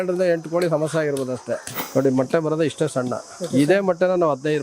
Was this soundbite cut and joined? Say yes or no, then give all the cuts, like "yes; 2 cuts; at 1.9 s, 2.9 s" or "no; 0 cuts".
yes; 1 cut; at 1.7 s